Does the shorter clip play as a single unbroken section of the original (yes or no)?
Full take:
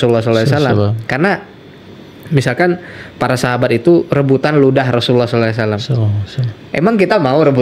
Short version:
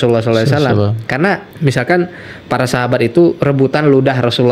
no